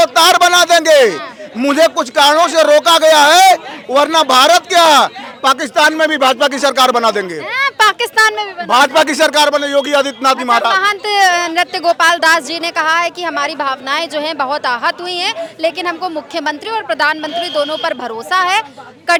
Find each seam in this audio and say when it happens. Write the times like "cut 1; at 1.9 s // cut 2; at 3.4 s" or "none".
none